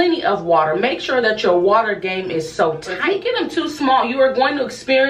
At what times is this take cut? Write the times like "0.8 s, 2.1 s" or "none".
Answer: 2.9 s